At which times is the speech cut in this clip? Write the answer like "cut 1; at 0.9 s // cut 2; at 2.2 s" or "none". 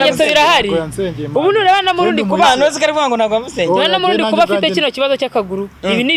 none